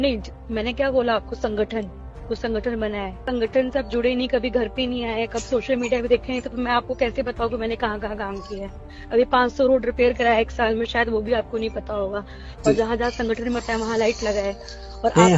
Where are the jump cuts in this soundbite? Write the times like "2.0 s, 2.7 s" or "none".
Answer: 3.2 s